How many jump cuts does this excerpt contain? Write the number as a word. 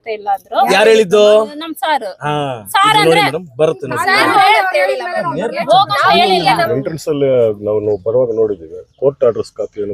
one